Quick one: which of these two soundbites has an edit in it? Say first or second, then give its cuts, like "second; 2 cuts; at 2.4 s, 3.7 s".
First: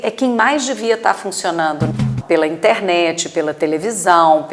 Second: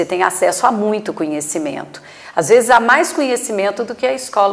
first; 1 cut; at 2.1 s